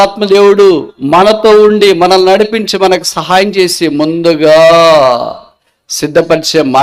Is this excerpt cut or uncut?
uncut